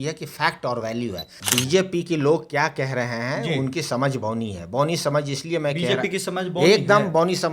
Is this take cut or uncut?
cut